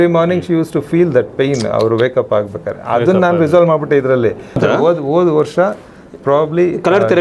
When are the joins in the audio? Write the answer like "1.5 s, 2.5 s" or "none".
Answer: 4.6 s